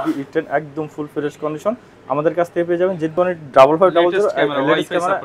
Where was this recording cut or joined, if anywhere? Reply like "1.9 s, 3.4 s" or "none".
3.1 s